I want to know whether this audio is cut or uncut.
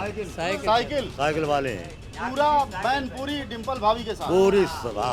uncut